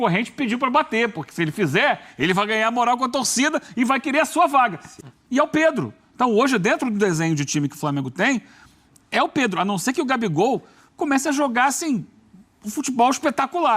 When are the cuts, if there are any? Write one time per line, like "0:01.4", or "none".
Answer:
0:04.9